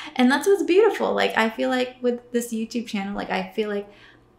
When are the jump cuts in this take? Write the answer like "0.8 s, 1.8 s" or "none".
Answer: none